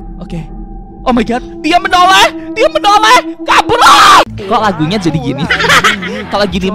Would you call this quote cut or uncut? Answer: cut